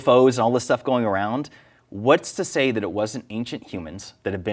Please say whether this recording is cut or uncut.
uncut